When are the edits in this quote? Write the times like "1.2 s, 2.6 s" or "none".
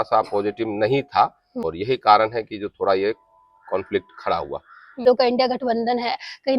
1.7 s, 5.0 s